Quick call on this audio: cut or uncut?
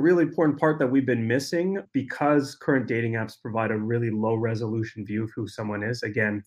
cut